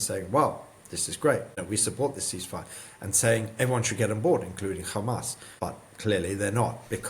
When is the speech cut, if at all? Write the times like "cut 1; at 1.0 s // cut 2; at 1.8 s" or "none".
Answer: cut 1; at 1.6 s // cut 2; at 5.4 s